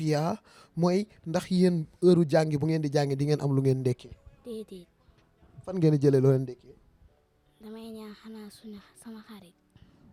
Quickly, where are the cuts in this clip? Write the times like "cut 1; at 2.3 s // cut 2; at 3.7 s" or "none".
none

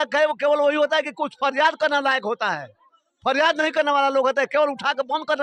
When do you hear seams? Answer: none

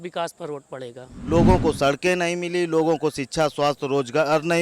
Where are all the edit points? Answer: cut 1; at 1.1 s

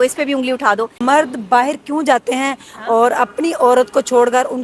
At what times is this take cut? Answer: cut 1; at 0.9 s

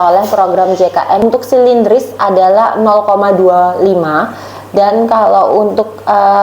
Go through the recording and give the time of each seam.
cut 1; at 1.2 s

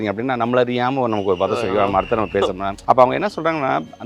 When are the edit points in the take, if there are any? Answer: cut 1; at 2.7 s

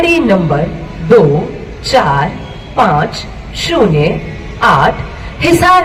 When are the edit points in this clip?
none

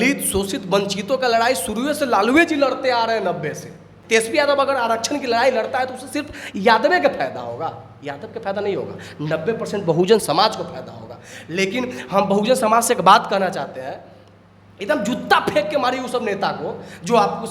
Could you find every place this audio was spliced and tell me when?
cut 1; at 3.9 s

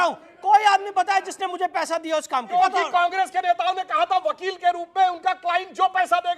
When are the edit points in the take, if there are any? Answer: cut 1; at 2.6 s

